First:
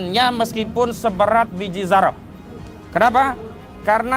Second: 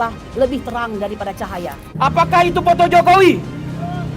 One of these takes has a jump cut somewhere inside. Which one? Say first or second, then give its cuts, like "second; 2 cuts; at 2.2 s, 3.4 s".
second; 1 cut; at 1.8 s